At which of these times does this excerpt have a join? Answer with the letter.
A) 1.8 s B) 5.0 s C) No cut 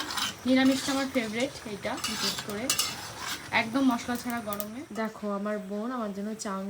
B